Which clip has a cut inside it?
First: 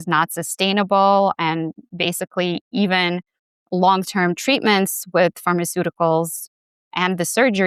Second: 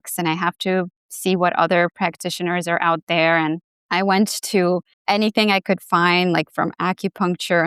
second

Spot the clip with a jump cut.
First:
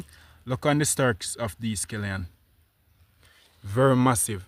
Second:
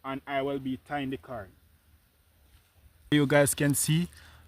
second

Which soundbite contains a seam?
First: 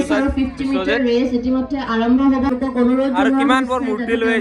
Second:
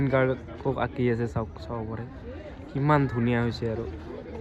first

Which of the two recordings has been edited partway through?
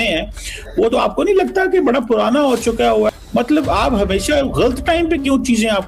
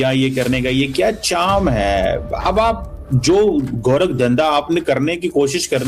first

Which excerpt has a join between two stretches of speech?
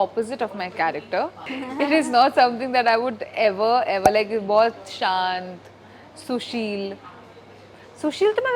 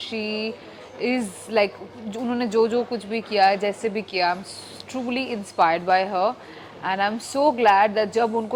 first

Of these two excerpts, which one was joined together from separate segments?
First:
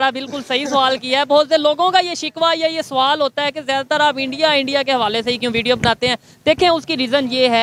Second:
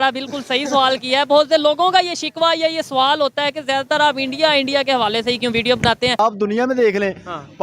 second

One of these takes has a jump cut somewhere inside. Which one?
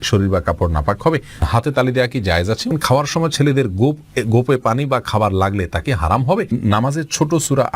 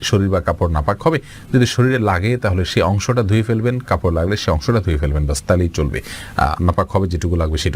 first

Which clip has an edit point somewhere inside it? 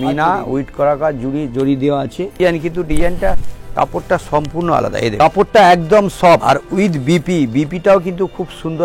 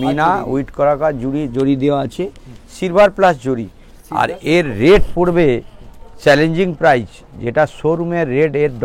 first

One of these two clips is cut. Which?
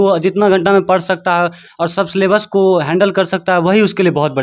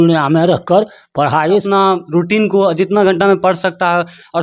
second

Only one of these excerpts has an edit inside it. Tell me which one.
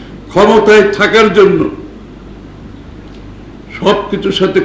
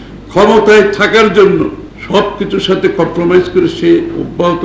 second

